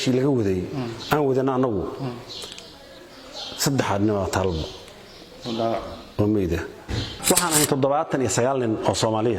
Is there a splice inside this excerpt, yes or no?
yes